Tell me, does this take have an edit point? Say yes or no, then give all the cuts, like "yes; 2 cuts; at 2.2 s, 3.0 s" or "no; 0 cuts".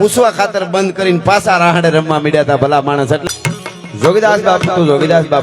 yes; 1 cut; at 3.2 s